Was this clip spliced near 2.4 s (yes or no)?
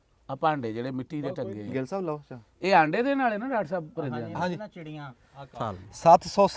no